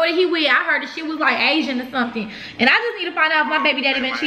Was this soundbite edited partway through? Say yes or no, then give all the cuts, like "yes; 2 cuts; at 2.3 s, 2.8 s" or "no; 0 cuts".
no; 0 cuts